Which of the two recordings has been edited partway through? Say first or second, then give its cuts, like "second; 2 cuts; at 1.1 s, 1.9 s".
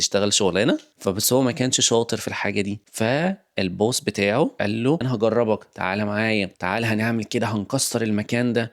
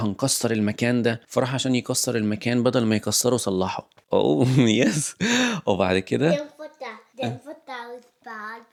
first; 3 cuts; at 0.9 s, 4.9 s, 6.5 s